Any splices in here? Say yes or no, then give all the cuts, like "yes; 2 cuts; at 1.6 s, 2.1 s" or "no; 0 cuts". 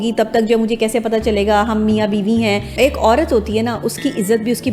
yes; 1 cut; at 2.7 s